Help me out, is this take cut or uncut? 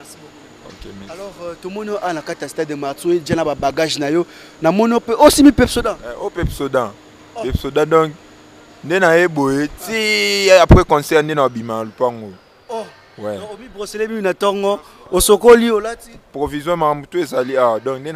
uncut